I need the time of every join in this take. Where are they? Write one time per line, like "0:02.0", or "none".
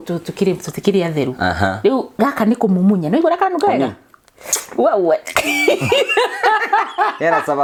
none